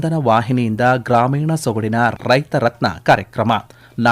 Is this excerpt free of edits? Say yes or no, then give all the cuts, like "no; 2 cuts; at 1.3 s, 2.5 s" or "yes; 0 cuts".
no; 1 cut; at 2.1 s